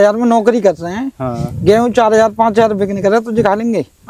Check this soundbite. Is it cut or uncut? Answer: uncut